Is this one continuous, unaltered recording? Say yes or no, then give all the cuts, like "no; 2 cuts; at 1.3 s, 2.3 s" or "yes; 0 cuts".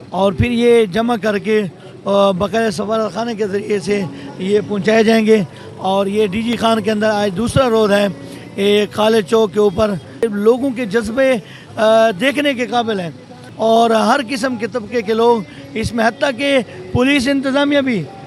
yes; 0 cuts